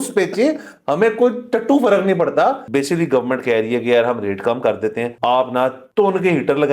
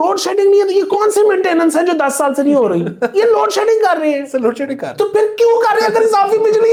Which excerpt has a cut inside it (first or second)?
first